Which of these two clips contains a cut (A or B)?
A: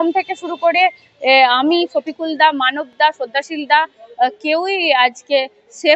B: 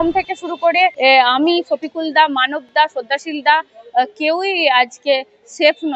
B